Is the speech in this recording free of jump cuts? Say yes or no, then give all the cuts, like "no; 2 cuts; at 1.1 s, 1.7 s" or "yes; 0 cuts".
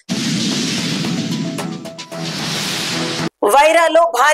yes; 0 cuts